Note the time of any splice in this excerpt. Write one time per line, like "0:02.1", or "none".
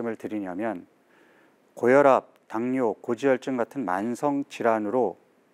none